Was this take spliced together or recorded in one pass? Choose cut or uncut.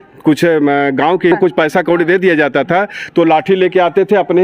cut